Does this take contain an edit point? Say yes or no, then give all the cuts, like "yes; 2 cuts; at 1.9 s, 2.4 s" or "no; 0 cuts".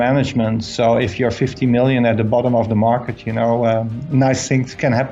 no; 0 cuts